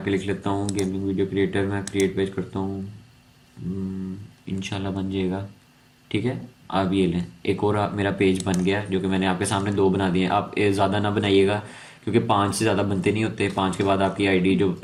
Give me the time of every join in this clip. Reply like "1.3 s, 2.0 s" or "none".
none